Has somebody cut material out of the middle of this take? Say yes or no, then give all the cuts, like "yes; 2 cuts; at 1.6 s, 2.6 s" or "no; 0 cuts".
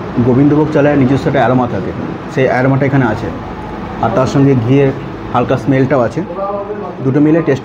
no; 0 cuts